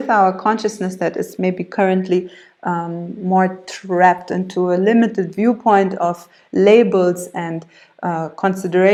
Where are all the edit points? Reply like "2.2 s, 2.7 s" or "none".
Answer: none